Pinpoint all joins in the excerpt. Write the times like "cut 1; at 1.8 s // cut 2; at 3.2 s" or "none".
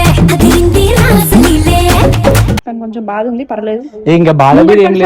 cut 1; at 2.6 s